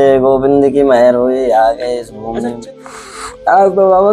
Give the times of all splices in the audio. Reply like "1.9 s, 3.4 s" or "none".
2.7 s